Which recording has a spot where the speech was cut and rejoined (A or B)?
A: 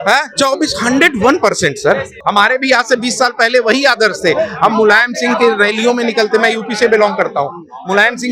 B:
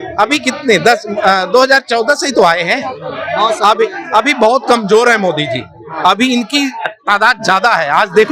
A